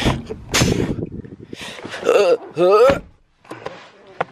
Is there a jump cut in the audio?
no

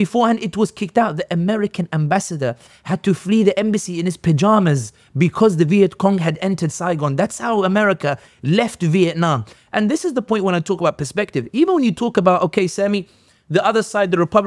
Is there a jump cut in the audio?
no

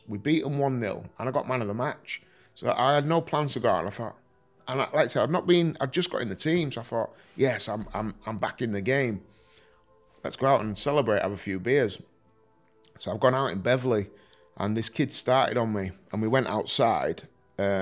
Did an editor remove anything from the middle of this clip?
no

